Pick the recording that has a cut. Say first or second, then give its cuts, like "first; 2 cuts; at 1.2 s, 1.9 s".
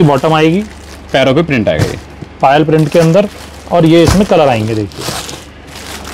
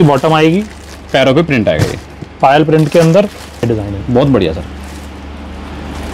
second; 1 cut; at 3.6 s